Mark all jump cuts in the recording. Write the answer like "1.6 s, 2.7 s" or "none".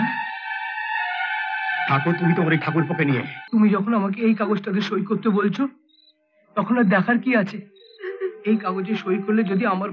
3.3 s